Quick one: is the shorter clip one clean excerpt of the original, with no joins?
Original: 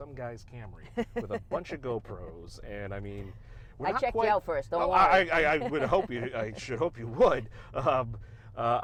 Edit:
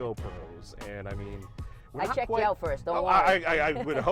yes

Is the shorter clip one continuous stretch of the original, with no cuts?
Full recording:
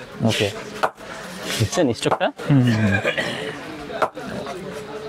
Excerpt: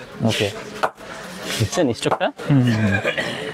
yes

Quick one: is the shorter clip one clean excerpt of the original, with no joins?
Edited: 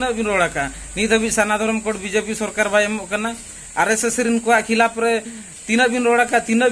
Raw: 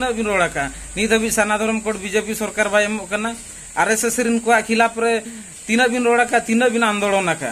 yes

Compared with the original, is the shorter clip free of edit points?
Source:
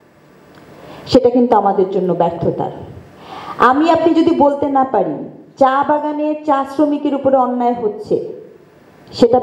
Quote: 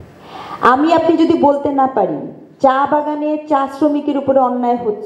yes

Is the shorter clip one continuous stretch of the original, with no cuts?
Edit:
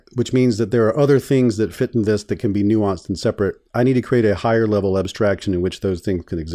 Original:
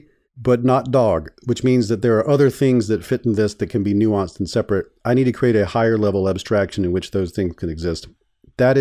yes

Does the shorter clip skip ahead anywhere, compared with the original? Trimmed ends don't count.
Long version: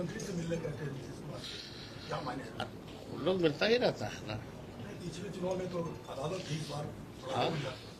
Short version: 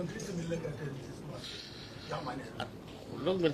no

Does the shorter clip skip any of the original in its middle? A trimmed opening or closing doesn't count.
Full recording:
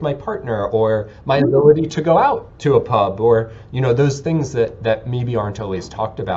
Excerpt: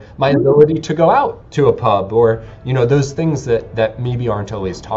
no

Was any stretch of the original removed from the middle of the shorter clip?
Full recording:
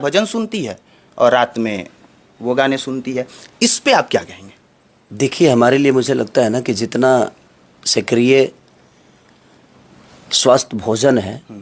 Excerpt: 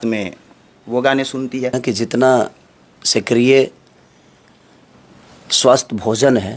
yes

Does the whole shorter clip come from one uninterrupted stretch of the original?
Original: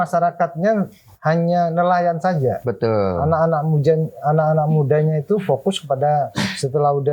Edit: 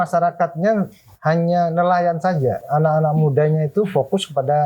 no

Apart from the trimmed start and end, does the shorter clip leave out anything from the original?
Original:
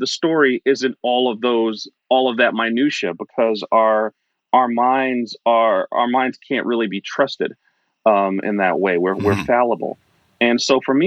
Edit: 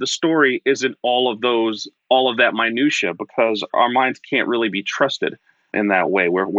yes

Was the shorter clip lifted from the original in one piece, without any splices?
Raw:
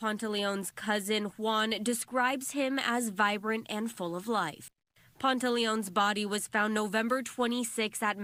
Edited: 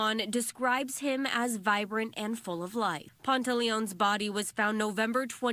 no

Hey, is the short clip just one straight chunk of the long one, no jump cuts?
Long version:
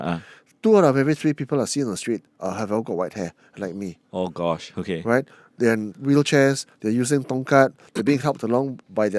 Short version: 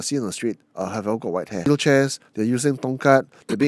no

